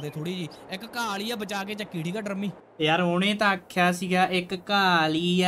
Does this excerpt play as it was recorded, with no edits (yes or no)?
no